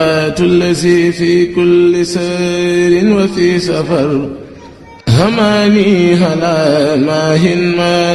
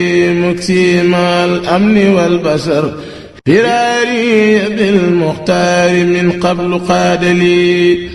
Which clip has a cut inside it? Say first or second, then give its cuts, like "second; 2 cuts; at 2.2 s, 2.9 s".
second; 1 cut; at 2.1 s